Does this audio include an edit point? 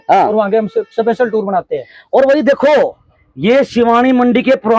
no; 0 cuts

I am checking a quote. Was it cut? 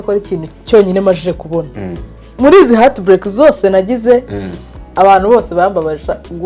yes; 1 cut; at 2.2 s

